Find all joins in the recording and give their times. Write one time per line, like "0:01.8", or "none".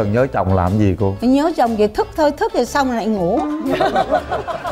none

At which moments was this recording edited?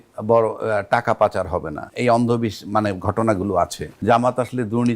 0:01.8
0:03.9

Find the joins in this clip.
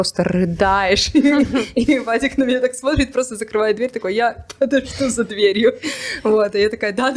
none

